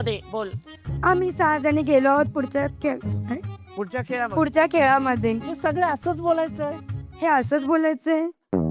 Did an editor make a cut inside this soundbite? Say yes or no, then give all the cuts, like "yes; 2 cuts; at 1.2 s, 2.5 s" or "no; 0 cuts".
no; 0 cuts